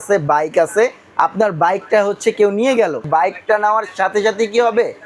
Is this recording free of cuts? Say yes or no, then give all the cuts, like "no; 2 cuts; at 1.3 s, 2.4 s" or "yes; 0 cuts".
no; 1 cut; at 3.1 s